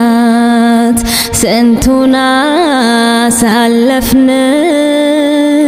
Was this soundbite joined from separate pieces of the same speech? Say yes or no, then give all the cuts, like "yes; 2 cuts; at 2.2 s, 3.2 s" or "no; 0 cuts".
no; 0 cuts